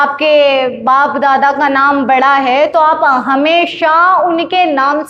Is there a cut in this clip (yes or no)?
no